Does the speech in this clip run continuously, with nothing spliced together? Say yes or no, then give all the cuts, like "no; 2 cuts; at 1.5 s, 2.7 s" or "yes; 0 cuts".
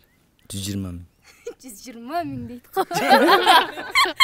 yes; 0 cuts